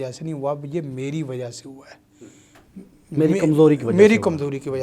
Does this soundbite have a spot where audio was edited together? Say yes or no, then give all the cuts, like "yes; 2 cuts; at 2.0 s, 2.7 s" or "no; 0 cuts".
no; 0 cuts